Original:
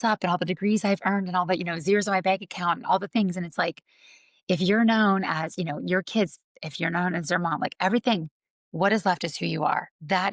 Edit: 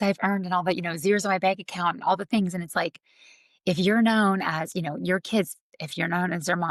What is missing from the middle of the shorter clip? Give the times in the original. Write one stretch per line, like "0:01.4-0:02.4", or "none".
none